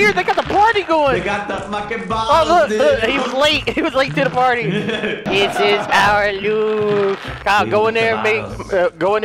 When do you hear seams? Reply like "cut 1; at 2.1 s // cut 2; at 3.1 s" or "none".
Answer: cut 1; at 5.2 s // cut 2; at 7.3 s